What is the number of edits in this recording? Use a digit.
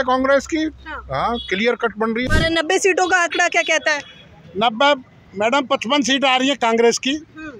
1